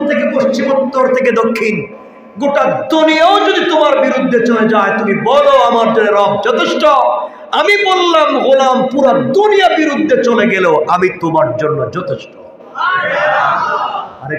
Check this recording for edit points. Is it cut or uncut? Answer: uncut